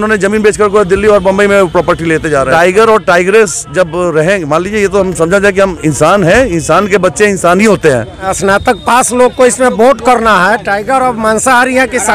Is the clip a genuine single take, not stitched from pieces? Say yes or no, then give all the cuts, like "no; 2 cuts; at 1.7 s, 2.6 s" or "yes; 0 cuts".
no; 2 cuts; at 2.5 s, 8.3 s